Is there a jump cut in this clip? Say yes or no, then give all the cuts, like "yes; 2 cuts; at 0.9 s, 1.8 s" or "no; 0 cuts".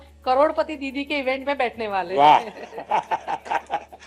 no; 0 cuts